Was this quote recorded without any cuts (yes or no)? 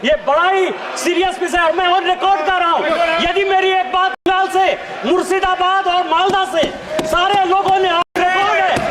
no